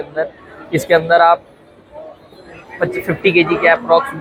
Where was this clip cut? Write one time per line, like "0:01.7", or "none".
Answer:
none